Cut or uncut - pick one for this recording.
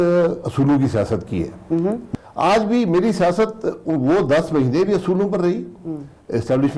cut